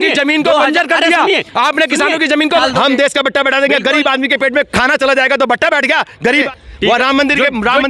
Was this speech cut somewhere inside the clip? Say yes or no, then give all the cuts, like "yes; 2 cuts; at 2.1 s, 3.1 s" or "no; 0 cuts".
yes; 2 cuts; at 2.6 s, 6.5 s